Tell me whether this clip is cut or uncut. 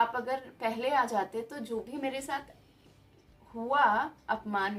uncut